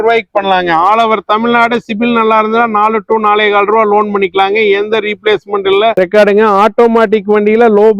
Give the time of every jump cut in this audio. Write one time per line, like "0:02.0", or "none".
0:05.9